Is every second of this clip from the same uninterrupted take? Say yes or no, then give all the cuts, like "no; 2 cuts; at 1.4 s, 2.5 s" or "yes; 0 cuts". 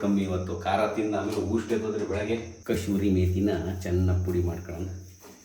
no; 1 cut; at 2.5 s